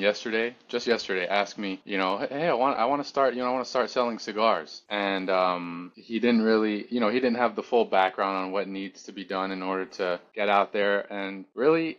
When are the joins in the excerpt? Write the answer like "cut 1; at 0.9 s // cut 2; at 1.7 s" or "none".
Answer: none